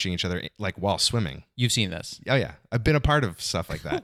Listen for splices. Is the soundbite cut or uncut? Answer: uncut